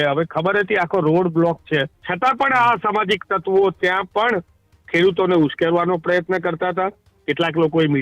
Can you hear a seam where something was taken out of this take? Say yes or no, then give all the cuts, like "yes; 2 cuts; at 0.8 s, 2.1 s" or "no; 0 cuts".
yes; 1 cut; at 2.0 s